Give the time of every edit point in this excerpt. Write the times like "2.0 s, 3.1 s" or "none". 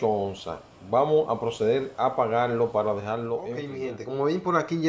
3.7 s